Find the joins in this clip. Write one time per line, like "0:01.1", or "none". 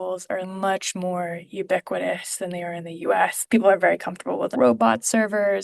0:03.4
0:04.5